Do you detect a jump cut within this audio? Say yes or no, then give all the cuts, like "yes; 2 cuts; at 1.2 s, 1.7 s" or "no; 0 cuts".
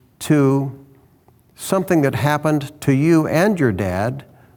no; 0 cuts